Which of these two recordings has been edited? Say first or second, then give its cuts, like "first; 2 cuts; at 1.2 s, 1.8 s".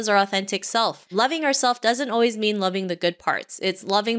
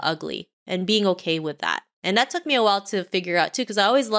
first; 1 cut; at 1.0 s